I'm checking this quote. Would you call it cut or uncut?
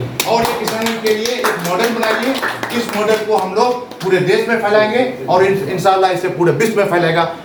uncut